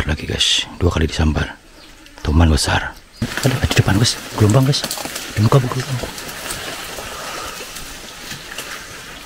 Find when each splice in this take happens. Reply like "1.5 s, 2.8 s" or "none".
3.2 s

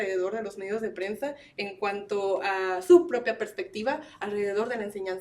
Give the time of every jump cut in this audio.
none

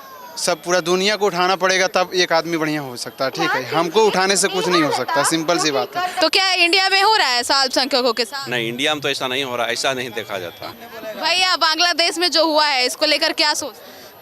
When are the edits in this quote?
6.1 s, 10.7 s

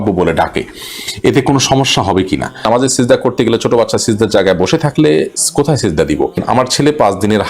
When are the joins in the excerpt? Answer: 2.6 s, 6.4 s

